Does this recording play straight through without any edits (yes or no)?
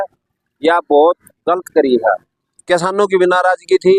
no